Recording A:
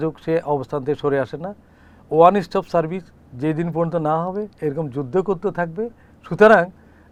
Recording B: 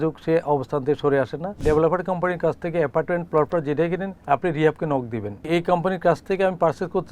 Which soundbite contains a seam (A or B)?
B